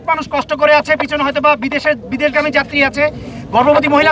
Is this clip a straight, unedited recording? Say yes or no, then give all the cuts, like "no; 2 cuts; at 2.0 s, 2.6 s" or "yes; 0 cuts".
yes; 0 cuts